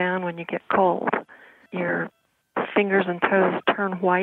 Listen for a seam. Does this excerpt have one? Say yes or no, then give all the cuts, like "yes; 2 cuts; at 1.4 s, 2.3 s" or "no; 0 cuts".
yes; 1 cut; at 1.5 s